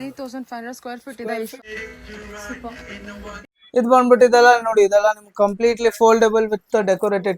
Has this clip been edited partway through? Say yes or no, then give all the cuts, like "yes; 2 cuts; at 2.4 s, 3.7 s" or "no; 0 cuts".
yes; 2 cuts; at 1.5 s, 3.5 s